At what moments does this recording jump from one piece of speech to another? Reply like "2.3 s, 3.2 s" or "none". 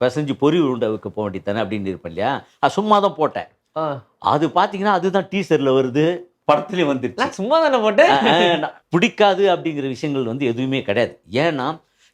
8.7 s